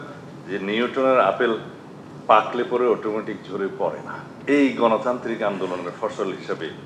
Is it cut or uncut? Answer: cut